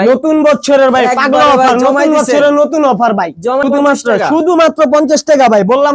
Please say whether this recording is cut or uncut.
cut